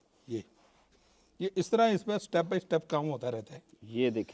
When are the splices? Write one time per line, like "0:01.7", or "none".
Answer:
none